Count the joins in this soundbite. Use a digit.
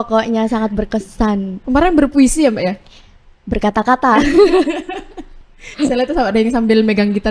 0